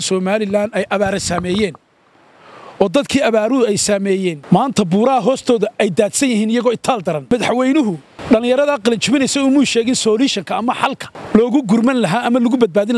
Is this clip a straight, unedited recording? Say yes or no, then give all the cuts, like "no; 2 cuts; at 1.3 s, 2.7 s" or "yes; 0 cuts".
no; 4 cuts; at 4.4 s, 7.3 s, 8.1 s, 11.1 s